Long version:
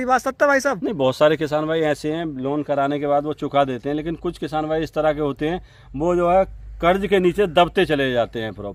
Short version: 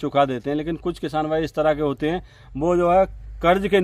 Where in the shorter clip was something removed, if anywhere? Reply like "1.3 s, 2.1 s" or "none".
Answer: none